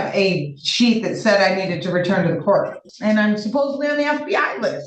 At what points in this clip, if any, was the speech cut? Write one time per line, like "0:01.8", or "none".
0:02.9